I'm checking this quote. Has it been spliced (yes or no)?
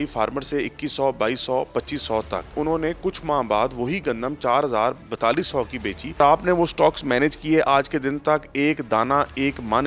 yes